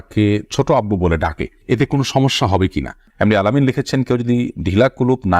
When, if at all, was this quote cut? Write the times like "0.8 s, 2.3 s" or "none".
3.1 s

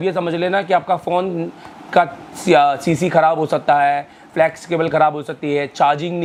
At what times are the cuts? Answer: none

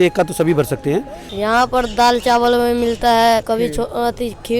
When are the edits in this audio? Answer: 1.2 s, 3.4 s

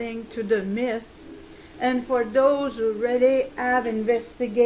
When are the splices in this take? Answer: none

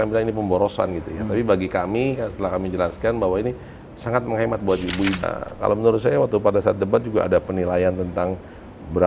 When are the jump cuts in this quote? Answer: 5.2 s

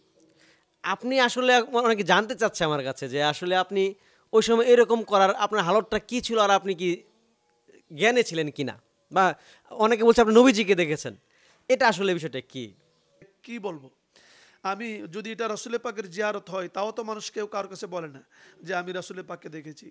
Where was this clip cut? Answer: 13.4 s

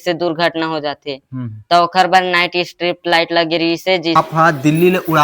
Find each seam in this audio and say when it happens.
4.2 s

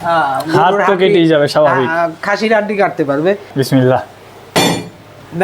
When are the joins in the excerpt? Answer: 3.6 s

